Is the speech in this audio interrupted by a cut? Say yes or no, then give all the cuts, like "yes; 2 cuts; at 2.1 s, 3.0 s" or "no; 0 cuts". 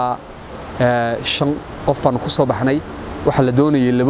no; 0 cuts